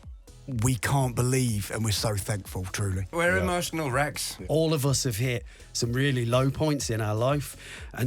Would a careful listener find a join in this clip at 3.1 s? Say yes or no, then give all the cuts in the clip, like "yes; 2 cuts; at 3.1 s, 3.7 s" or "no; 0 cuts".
yes; 2 cuts; at 3.1 s, 4.4 s